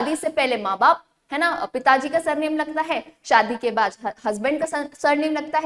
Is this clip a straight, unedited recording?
yes; 0 cuts

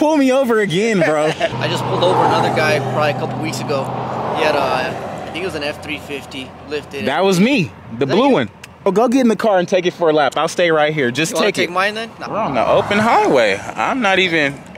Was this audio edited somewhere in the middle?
yes; 3 cuts; at 1.6 s, 8.9 s, 12.2 s

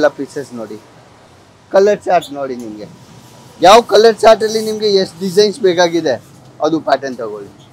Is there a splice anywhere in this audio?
no; 0 cuts

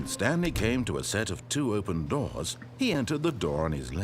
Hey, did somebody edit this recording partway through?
yes; 1 cut; at 2.0 s

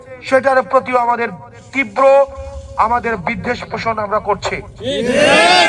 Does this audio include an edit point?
no; 0 cuts

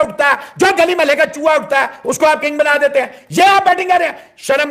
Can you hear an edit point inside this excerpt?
no; 0 cuts

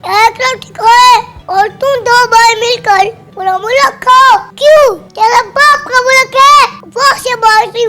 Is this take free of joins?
no; 4 cuts; at 1.4 s, 4.5 s, 5.1 s, 6.8 s

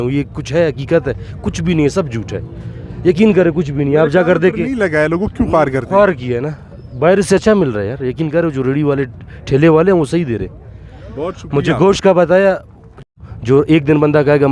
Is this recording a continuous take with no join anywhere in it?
yes; 0 cuts

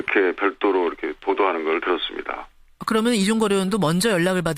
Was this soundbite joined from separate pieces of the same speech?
no; 0 cuts

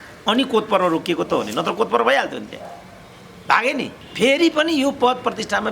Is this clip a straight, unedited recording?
no; 1 cut; at 4.0 s

